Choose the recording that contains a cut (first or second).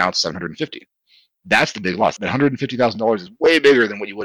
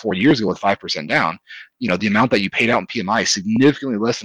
first